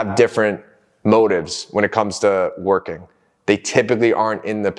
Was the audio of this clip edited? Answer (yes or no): no